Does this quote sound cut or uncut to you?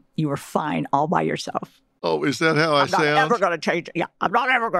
cut